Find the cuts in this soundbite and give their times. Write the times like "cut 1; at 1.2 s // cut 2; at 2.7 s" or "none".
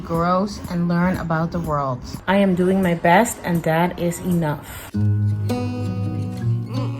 cut 1; at 2.1 s // cut 2; at 4.8 s